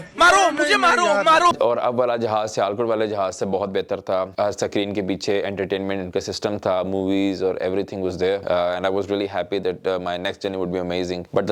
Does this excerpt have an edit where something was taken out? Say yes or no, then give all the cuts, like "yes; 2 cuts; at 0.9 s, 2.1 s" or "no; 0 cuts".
yes; 1 cut; at 1.5 s